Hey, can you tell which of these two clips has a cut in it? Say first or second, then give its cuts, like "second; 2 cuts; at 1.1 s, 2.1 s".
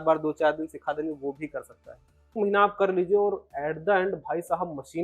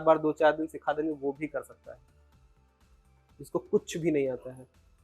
first; 1 cut; at 2.3 s